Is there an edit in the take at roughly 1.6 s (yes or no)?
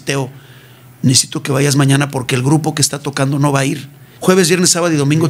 no